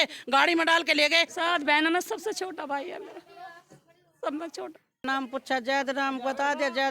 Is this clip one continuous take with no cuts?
no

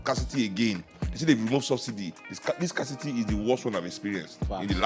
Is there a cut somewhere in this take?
no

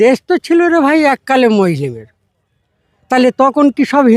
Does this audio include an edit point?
no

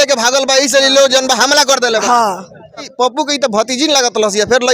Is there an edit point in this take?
yes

